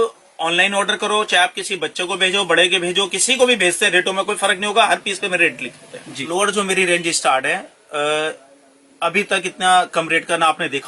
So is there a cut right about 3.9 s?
no; 1 cut; at 6.2 s

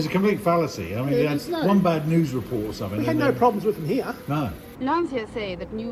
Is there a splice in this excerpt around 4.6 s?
no; 0 cuts

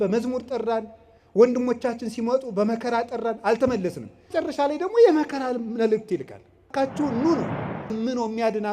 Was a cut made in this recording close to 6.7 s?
yes; 3 cuts; at 4.3 s, 6.7 s, 8.0 s

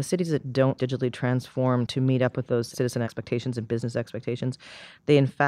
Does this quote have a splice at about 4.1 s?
no; 0 cuts

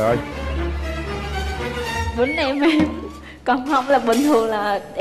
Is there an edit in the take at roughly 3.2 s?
no; 0 cuts

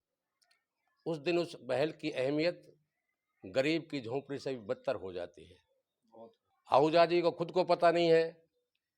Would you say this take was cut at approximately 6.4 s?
yes; 1 cut; at 6.4 s

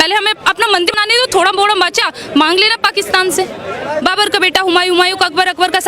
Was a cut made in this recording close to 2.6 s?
no; 2 cuts; at 0.9 s, 4.0 s

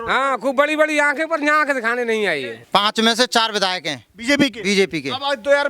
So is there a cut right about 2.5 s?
yes; 1 cut; at 2.5 s

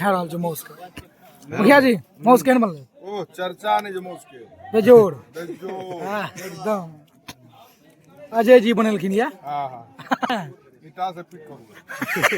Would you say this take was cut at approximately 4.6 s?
no; 1 cut; at 10.3 s

